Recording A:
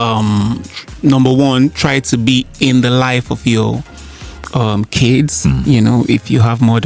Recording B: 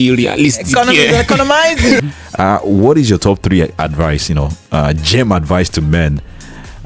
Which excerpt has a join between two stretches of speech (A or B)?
B